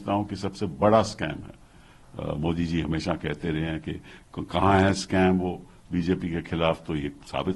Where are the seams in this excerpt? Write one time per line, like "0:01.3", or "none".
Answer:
none